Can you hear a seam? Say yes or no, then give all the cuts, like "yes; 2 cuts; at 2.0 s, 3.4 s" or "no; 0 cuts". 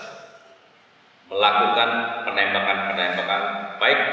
no; 0 cuts